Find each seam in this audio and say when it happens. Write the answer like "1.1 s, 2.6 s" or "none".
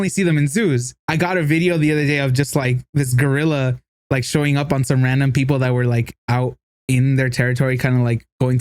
1.0 s